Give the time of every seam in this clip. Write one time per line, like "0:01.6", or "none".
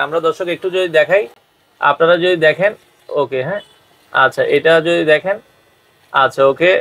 none